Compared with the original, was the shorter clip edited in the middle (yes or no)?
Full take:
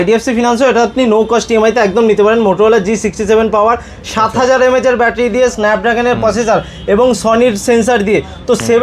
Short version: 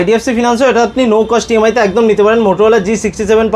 no